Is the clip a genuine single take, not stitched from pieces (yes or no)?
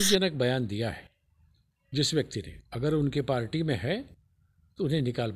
yes